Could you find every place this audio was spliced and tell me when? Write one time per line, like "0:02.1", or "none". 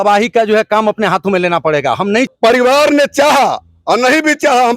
0:02.3